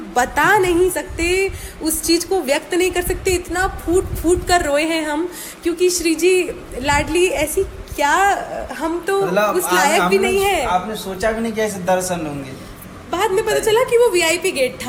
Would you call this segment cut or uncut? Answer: uncut